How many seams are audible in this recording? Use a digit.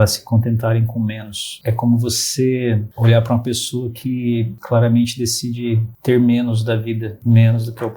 5